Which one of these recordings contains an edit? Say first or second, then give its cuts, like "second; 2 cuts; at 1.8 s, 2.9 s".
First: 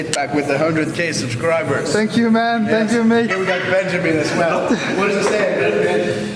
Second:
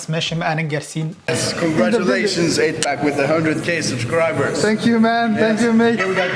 second; 1 cut; at 1.3 s